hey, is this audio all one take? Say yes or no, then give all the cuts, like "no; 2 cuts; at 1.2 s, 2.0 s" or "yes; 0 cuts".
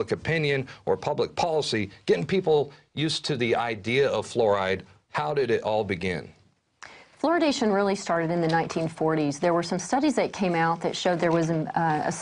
yes; 0 cuts